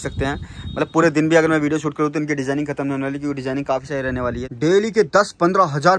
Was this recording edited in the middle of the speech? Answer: yes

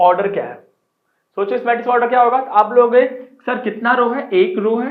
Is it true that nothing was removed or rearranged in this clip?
yes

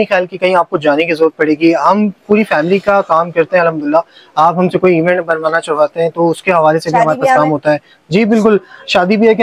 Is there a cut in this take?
no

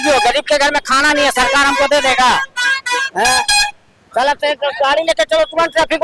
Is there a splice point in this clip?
no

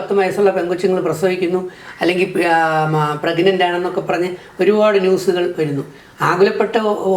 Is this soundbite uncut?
yes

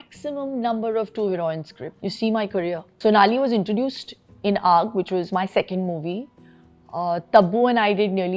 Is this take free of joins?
yes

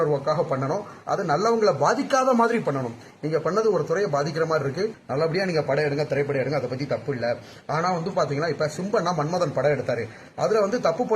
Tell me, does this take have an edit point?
yes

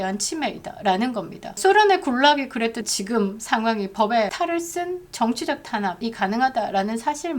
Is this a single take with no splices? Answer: no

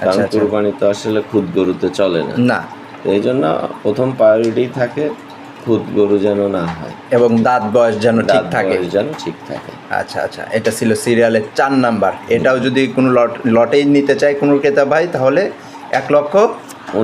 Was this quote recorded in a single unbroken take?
yes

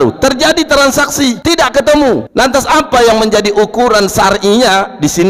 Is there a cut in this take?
yes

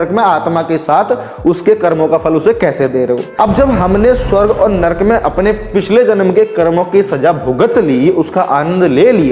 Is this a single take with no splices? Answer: no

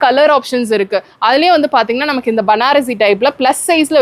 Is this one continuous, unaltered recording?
yes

